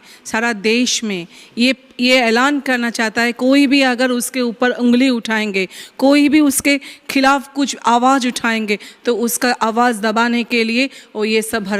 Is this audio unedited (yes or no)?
yes